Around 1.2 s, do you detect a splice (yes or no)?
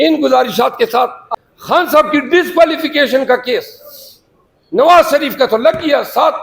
yes